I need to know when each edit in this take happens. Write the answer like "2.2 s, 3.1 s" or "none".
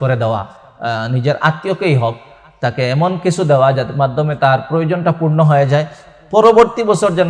none